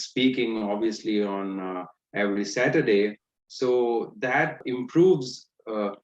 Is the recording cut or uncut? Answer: cut